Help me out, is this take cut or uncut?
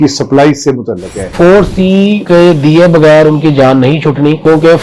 cut